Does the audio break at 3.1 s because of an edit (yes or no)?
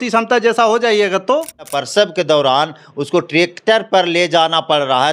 no